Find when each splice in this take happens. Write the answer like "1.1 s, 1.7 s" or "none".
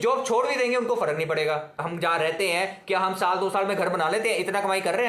1.8 s